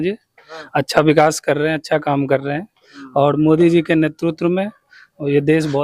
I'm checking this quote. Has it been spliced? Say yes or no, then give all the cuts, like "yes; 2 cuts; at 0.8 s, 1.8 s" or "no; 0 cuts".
no; 0 cuts